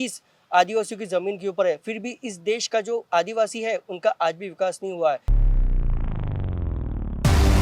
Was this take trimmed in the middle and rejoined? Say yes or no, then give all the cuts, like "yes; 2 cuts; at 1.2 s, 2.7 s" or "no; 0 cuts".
yes; 1 cut; at 5.4 s